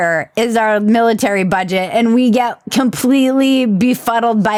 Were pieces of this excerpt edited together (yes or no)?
no